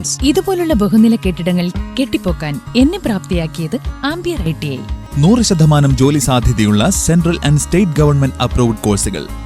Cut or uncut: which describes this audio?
cut